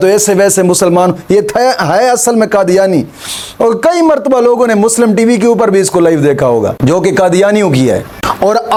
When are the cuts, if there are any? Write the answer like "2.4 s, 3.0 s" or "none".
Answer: none